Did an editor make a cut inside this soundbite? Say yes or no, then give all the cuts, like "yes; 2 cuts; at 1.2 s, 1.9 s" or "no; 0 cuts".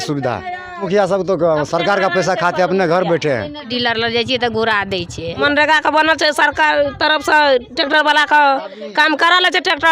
yes; 3 cuts; at 0.9 s, 3.7 s, 5.4 s